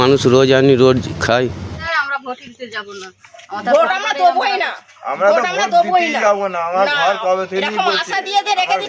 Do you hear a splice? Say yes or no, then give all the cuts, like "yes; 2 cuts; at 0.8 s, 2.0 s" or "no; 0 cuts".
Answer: yes; 1 cut; at 1.7 s